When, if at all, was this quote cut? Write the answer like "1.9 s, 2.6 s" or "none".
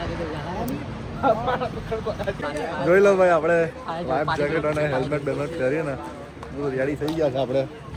none